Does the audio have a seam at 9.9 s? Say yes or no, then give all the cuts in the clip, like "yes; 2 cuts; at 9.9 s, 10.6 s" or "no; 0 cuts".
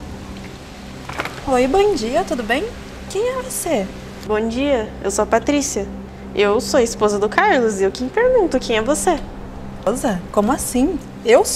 yes; 2 cuts; at 4.1 s, 9.9 s